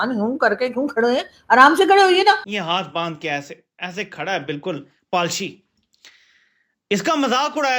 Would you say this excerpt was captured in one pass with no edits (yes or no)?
no